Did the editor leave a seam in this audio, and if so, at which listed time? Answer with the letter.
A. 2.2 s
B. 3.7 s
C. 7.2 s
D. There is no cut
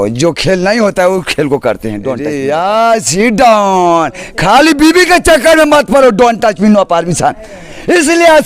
A